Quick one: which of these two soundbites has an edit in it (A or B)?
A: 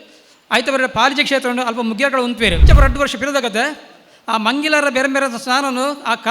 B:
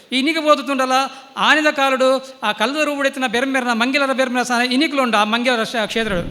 A